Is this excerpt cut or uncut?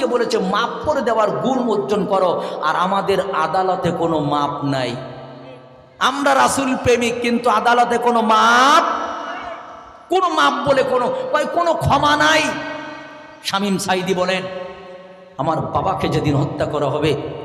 uncut